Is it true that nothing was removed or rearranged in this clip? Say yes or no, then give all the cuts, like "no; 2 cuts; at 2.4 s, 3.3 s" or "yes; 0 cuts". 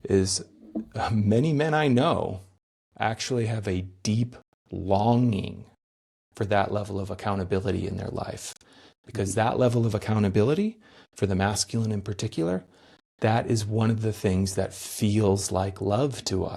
yes; 0 cuts